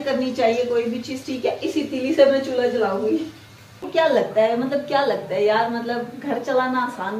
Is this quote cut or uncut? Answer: cut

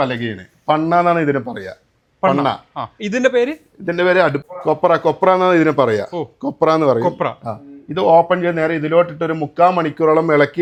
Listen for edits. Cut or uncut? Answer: uncut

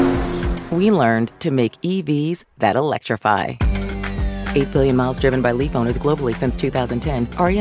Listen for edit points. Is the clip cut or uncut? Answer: uncut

